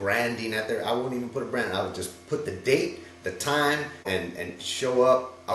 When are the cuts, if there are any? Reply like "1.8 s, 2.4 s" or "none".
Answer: 4.1 s